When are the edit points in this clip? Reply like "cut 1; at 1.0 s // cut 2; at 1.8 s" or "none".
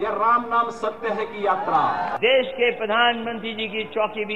cut 1; at 2.1 s